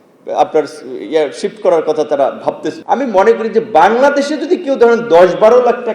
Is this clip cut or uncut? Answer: cut